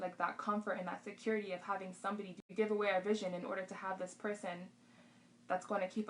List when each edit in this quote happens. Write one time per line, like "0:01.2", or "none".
0:02.4